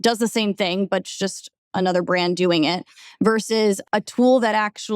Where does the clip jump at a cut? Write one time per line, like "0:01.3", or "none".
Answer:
0:03.8